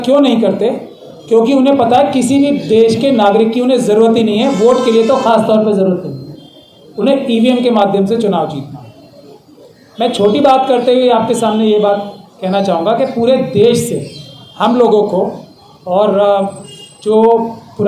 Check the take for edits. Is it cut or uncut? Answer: uncut